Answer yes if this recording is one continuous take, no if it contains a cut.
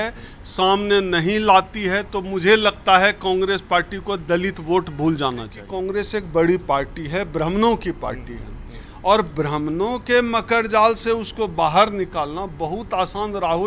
no